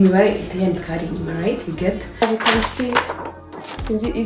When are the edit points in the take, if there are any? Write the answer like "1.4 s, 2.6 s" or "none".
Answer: 2.2 s